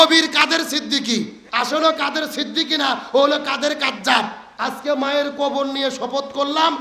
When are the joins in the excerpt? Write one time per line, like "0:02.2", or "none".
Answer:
0:01.4
0:04.4